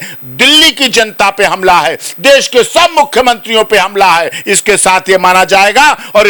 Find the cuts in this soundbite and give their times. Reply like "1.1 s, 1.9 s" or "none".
none